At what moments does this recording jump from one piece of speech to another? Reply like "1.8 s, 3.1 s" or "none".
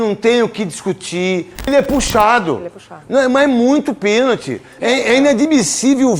1.7 s